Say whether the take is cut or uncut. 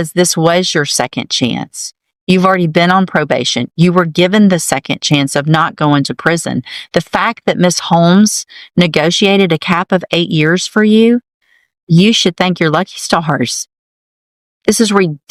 uncut